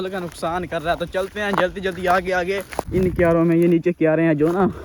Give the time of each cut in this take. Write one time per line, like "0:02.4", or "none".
0:02.7